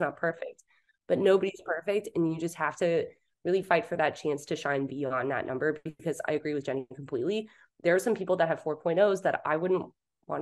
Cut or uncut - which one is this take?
uncut